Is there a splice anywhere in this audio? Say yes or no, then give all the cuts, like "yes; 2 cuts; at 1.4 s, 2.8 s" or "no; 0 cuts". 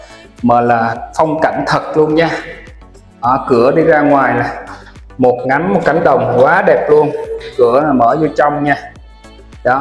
no; 0 cuts